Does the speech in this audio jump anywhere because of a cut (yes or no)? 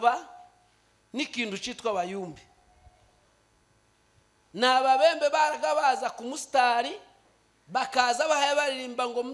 no